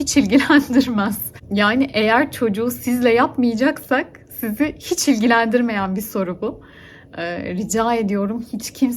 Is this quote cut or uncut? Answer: uncut